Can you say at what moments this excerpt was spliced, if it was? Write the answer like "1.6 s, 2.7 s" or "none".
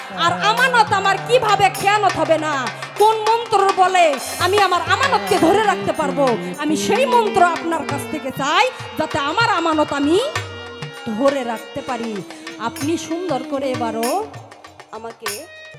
none